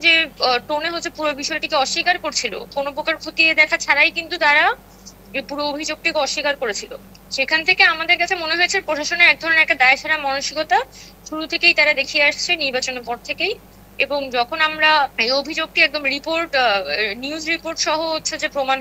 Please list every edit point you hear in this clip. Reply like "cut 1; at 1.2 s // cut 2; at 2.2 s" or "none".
none